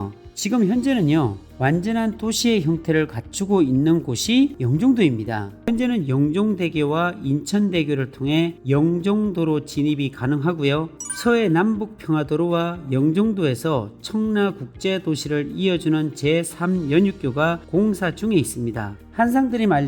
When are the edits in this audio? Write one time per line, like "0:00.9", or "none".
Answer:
0:05.7
0:18.9